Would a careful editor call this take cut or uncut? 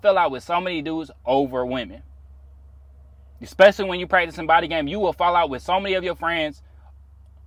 uncut